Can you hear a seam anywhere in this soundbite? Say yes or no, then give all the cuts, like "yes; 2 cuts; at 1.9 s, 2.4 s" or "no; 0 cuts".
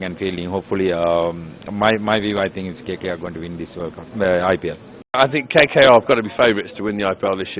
yes; 1 cut; at 5.2 s